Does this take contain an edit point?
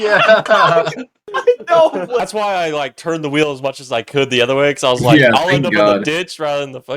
yes; 1 cut; at 2.2 s

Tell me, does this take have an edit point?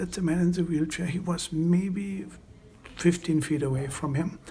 no; 0 cuts

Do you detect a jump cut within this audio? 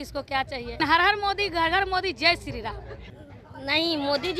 yes; 2 cuts; at 0.8 s, 3.0 s

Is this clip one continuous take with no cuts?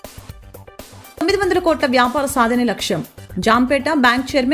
no; 1 cut; at 1.0 s

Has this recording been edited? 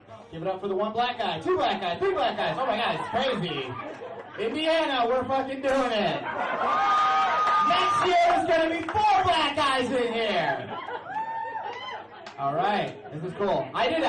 no; 0 cuts

